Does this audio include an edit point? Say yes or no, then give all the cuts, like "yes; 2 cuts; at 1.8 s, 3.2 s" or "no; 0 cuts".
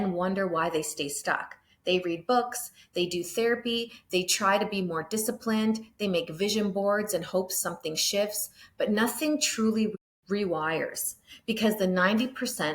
no; 0 cuts